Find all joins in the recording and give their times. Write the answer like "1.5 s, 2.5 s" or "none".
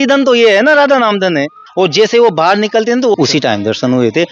1.6 s, 3.1 s